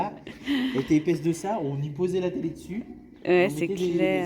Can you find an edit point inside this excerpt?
no; 0 cuts

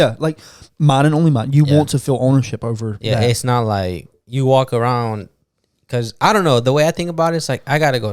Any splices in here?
no; 0 cuts

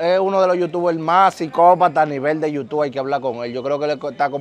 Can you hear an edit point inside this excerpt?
no; 0 cuts

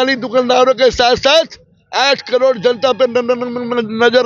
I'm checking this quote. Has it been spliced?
no; 0 cuts

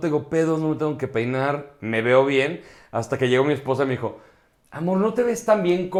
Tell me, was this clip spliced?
no; 0 cuts

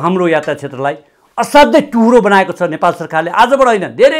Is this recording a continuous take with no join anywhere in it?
yes; 0 cuts

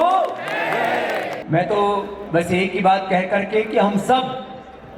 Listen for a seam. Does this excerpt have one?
yes; 1 cut; at 1.4 s

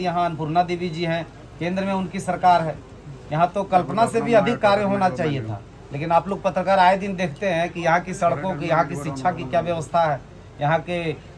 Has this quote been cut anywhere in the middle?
no; 0 cuts

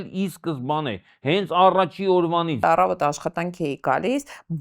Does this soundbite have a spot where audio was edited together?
yes; 1 cut; at 2.6 s

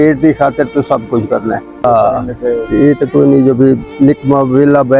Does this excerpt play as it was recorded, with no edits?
no; 1 cut; at 1.8 s

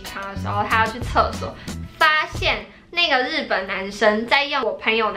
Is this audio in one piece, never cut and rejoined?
yes; 0 cuts

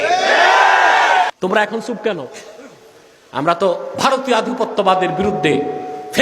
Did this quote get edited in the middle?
yes; 1 cut; at 1.3 s

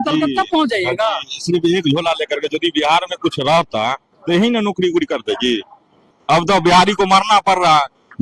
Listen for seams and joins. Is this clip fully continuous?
no; 1 cut; at 6.0 s

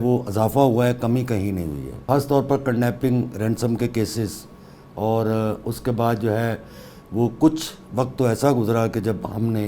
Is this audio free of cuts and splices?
no; 1 cut; at 1.9 s

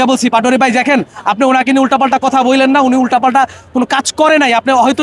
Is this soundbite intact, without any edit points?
yes; 0 cuts

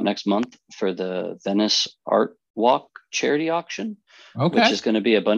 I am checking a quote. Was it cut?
no; 0 cuts

